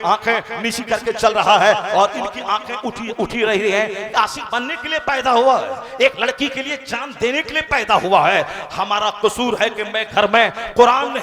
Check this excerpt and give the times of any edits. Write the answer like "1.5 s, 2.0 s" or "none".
4.1 s

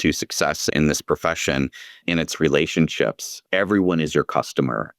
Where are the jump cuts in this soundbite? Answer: 0.7 s, 2.0 s

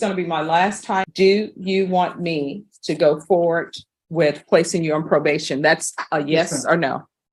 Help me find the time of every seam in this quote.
1.1 s

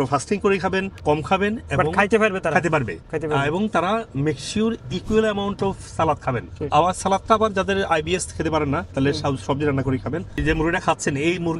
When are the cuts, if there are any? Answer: 10.4 s

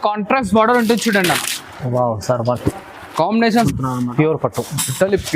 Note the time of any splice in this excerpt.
3.7 s

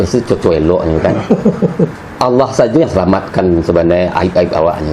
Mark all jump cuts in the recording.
1.9 s

